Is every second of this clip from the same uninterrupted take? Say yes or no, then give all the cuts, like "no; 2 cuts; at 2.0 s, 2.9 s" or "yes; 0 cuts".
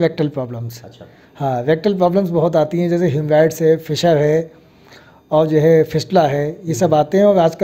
yes; 0 cuts